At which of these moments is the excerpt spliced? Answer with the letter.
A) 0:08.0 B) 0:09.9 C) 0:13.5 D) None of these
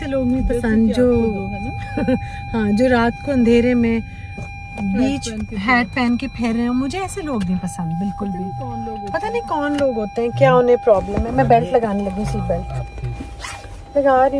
D